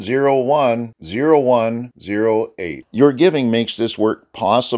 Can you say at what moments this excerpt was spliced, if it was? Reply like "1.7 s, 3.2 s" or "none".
none